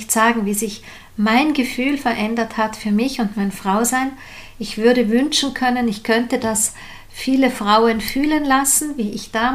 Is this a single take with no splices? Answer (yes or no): yes